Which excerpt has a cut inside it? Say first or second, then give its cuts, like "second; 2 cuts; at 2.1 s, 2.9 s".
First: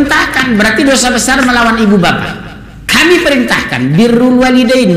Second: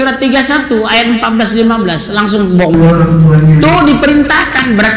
second; 1 cut; at 2.8 s